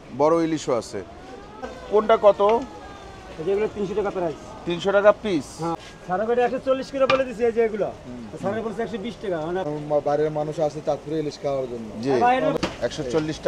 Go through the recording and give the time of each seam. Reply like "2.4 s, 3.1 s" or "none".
1.7 s, 5.8 s, 9.7 s, 12.6 s